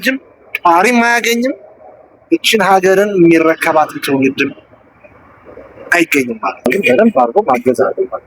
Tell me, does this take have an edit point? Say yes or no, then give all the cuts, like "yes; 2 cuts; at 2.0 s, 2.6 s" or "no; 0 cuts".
yes; 1 cut; at 6.7 s